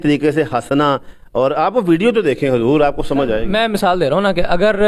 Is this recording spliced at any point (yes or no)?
no